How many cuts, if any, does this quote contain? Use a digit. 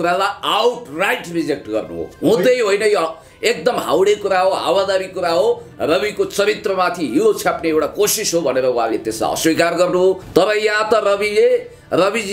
1